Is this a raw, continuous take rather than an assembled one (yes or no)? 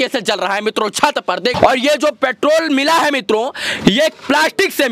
no